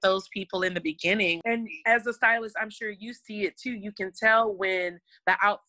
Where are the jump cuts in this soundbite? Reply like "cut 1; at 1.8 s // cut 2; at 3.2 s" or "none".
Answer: cut 1; at 1.4 s